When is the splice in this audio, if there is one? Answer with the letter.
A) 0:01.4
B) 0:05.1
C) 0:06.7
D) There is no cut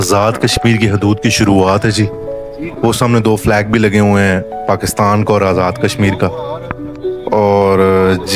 D